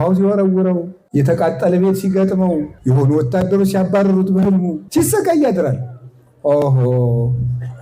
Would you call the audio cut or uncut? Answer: cut